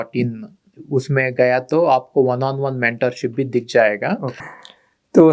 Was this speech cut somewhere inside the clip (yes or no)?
yes